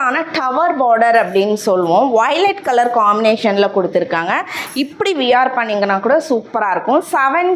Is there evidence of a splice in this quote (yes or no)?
no